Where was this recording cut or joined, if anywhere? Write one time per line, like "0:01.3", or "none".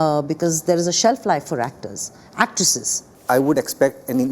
0:03.1